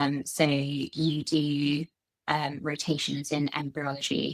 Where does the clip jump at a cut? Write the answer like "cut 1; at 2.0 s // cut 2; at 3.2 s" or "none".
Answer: none